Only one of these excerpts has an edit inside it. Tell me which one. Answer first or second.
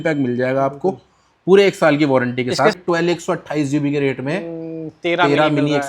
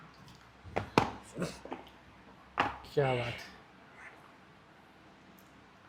first